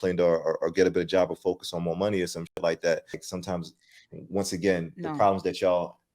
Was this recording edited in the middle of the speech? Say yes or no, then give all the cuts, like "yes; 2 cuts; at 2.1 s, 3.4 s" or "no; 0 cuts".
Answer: yes; 1 cut; at 3.3 s